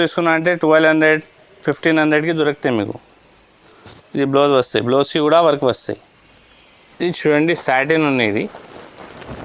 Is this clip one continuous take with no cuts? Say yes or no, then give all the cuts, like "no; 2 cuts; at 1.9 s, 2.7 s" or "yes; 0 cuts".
yes; 0 cuts